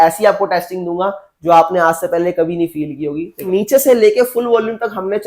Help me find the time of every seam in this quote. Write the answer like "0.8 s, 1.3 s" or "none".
3.4 s